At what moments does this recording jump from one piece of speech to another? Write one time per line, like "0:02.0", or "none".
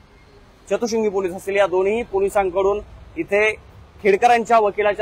none